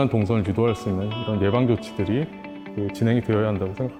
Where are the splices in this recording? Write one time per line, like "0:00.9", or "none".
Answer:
none